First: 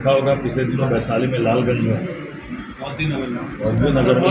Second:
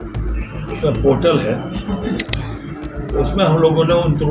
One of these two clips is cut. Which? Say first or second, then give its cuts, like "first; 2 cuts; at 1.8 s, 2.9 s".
second; 1 cut; at 2.2 s